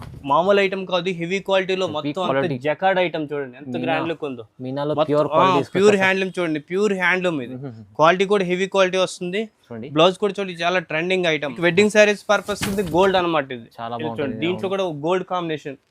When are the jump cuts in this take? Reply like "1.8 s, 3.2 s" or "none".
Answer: 11.6 s